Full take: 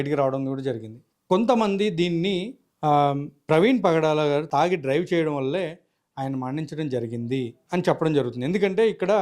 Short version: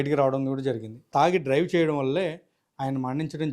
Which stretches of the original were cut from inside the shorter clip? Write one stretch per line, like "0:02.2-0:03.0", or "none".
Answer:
0:01.1-0:04.5